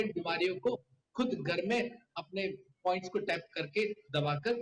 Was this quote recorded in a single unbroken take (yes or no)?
yes